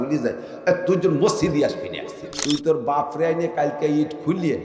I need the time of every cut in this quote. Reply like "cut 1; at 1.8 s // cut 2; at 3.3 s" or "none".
cut 1; at 2.3 s